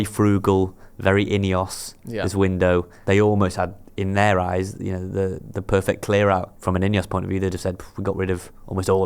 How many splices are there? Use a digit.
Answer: 2